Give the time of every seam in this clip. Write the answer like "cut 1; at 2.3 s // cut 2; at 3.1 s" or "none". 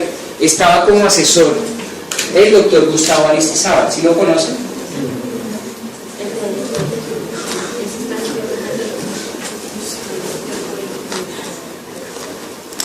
cut 1; at 10.1 s

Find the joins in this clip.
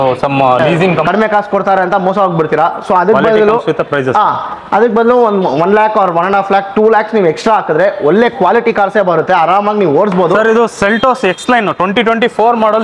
cut 1; at 1.1 s // cut 2; at 10.4 s

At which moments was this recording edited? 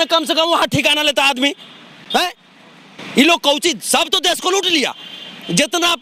none

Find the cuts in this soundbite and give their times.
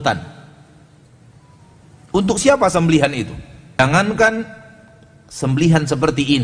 cut 1; at 3.8 s

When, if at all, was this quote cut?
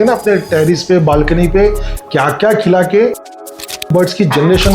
cut 1; at 3.5 s

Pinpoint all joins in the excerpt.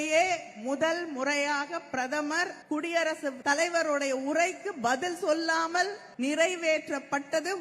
cut 1; at 2.6 s // cut 2; at 3.4 s // cut 3; at 6.0 s

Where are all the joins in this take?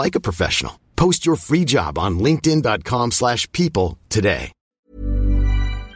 cut 1; at 4.6 s

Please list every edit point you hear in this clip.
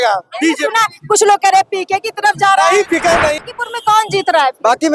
cut 1; at 3.5 s

